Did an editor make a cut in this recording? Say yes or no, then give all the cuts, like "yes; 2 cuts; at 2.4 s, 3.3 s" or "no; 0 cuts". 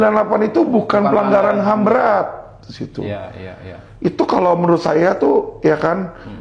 no; 0 cuts